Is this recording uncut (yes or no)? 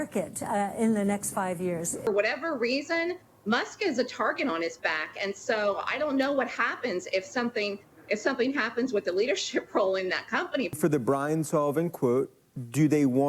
no